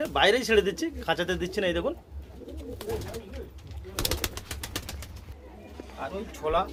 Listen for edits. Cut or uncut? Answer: uncut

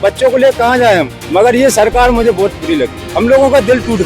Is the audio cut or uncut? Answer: cut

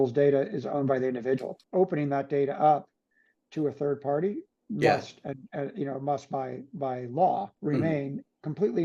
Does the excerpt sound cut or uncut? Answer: cut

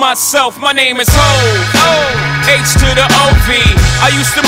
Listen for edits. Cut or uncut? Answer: uncut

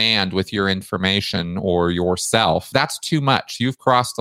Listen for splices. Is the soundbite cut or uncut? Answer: cut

